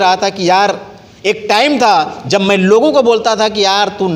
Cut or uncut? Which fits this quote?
uncut